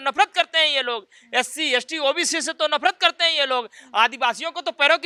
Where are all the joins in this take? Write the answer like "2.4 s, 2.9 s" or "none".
none